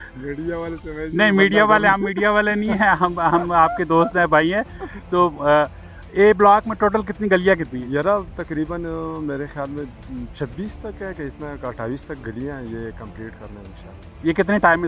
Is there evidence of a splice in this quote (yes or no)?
no